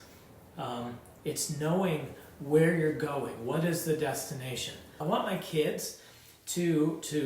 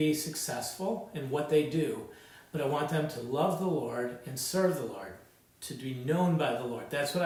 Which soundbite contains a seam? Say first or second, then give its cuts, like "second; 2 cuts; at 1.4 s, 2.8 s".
first; 1 cut; at 4.9 s